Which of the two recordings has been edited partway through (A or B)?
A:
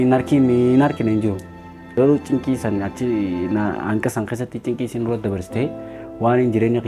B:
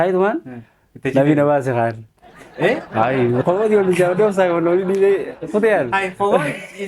A